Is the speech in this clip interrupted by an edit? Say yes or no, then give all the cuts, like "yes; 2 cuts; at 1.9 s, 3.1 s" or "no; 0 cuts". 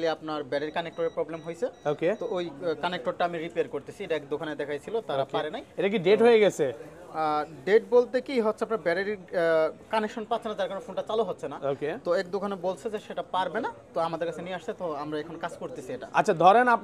no; 0 cuts